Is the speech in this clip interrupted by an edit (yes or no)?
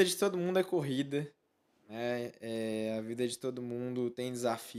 no